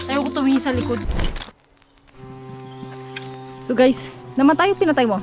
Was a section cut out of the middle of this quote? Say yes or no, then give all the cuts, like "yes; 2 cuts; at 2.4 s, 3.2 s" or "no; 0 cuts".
yes; 1 cut; at 1.1 s